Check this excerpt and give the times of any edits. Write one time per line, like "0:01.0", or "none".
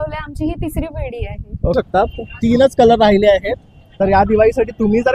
0:01.7